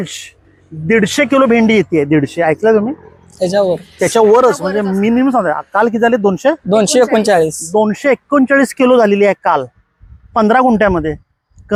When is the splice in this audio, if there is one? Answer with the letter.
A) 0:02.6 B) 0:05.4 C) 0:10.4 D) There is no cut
D